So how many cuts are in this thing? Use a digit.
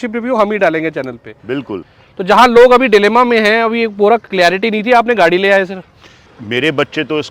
2